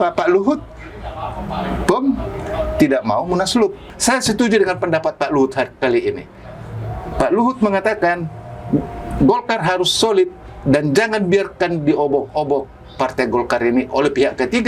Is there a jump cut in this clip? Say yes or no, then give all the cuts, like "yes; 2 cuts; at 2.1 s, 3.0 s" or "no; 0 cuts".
yes; 1 cut; at 3.9 s